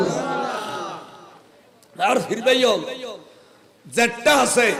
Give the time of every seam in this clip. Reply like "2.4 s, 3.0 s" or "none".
none